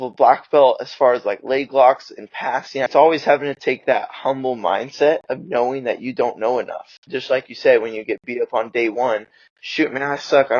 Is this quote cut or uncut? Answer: cut